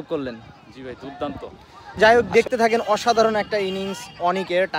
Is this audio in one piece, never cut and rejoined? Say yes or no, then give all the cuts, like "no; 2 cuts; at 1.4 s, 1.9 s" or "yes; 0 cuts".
no; 1 cut; at 2.0 s